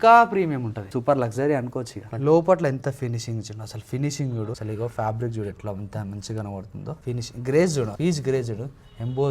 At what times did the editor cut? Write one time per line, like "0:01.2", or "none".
0:00.9
0:02.0
0:04.6
0:07.0